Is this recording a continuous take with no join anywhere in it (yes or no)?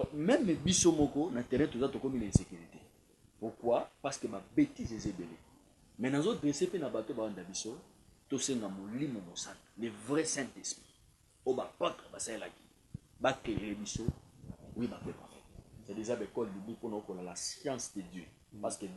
no